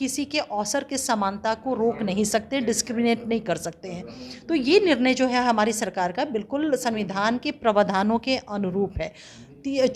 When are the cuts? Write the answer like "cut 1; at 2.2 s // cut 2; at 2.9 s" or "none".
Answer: none